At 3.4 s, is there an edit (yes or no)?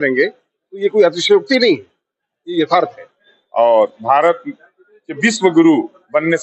yes